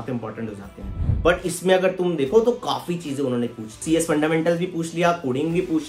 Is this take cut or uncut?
cut